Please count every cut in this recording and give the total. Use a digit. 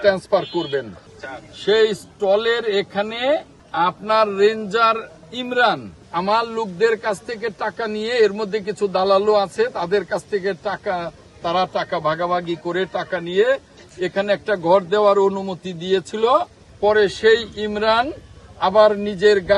4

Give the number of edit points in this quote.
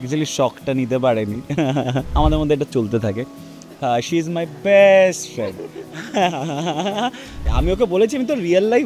2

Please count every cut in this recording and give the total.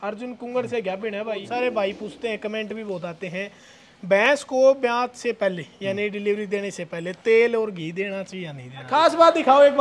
2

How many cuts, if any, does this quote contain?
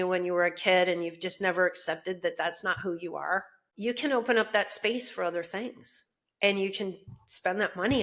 1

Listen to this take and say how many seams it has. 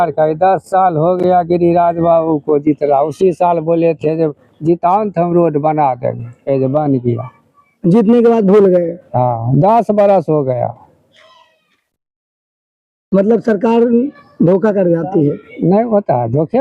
0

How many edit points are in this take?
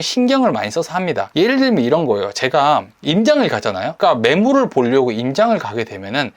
2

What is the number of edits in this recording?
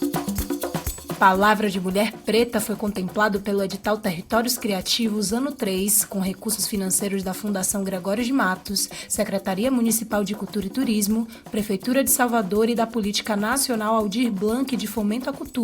1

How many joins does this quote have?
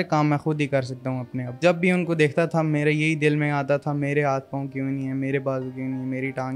1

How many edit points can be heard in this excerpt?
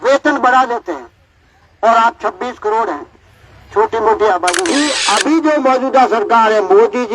1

